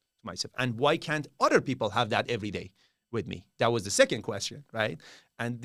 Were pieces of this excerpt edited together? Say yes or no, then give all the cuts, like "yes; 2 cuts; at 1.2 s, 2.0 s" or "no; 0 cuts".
no; 0 cuts